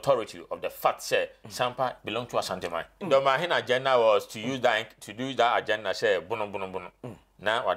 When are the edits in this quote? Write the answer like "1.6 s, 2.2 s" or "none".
3.0 s